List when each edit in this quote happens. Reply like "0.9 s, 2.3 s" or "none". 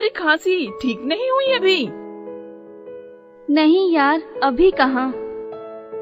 1.9 s, 3.3 s